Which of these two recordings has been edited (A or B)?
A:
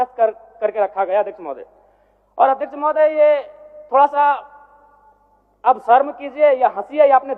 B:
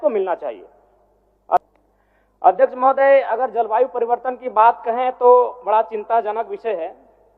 B